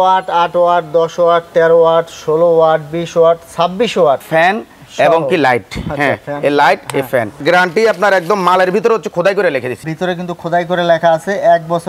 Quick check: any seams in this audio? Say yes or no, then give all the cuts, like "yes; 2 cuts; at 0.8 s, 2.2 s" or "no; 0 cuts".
yes; 2 cuts; at 4.2 s, 7.4 s